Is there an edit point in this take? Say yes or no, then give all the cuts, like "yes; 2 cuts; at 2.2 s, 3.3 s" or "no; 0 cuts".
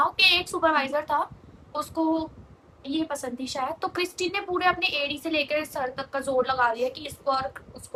no; 0 cuts